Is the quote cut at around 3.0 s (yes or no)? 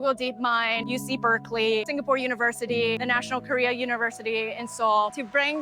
yes